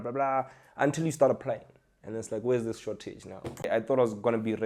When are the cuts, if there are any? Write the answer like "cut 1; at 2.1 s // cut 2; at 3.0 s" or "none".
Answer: cut 1; at 3.7 s